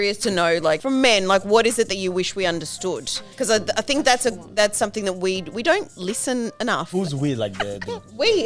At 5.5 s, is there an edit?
no; 3 cuts; at 0.8 s, 3.2 s, 6.9 s

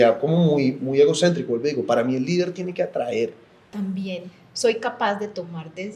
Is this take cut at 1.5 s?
no; 1 cut; at 3.7 s

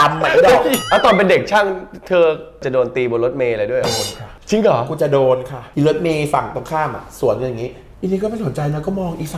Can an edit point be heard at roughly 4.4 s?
no; 4 cuts; at 0.8 s, 2.7 s, 5.6 s, 7.8 s

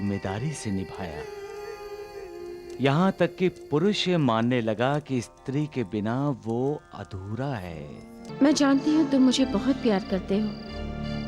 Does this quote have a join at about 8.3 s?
yes; 1 cut; at 8.3 s

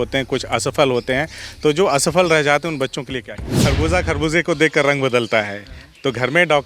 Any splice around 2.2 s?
no; 1 cut; at 3.5 s

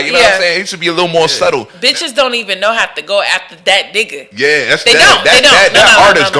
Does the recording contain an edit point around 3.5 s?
no; 1 cut; at 1.7 s

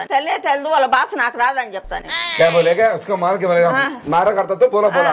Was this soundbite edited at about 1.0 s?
no; 0 cuts

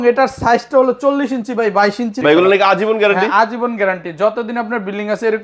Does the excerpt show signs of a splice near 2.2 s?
yes; 1 cut; at 2.2 s

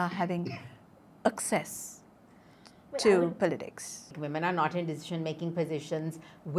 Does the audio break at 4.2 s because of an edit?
yes; 1 cut; at 4.2 s

